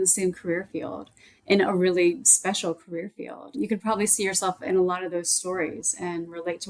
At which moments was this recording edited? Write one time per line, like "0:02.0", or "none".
0:03.5